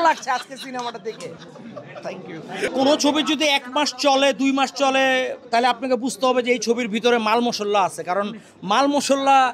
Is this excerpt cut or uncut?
uncut